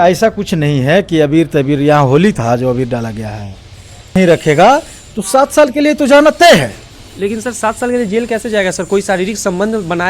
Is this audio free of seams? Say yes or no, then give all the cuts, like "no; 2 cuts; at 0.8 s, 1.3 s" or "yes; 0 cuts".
no; 1 cut; at 4.2 s